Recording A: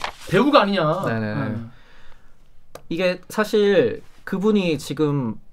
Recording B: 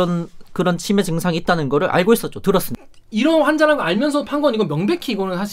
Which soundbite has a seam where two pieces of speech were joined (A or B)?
B